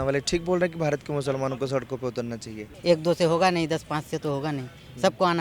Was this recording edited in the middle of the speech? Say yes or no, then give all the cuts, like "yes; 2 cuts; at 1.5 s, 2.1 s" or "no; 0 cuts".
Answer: yes; 1 cut; at 2.7 s